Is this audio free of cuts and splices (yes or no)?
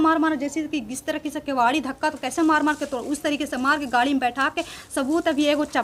yes